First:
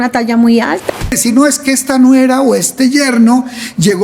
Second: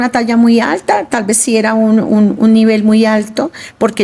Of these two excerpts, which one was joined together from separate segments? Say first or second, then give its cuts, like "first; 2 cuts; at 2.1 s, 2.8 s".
first; 1 cut; at 1.1 s